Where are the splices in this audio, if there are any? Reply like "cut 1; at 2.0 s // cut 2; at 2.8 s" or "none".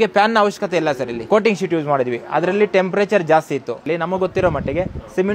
cut 1; at 1.2 s // cut 2; at 3.8 s